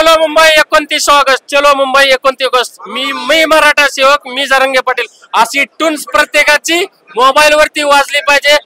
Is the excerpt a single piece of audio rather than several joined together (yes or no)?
yes